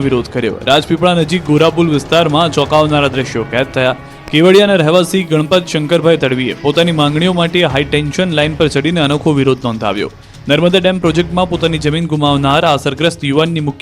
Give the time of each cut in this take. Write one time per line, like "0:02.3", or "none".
0:06.4